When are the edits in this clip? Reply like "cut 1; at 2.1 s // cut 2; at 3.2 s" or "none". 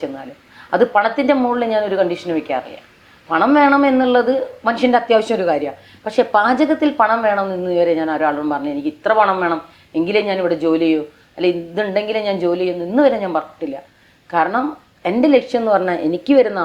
none